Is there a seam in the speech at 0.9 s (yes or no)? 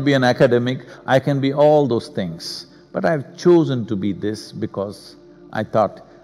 yes